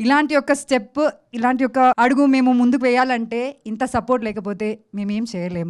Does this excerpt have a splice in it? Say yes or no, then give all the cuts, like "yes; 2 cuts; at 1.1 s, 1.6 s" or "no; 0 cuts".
yes; 1 cut; at 2.0 s